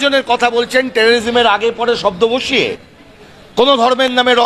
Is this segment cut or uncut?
uncut